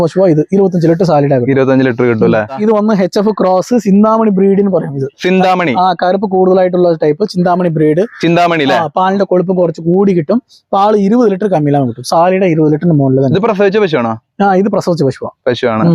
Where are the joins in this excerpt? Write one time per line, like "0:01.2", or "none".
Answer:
0:02.4